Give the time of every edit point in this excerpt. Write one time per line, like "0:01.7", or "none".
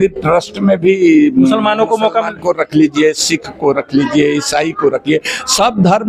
none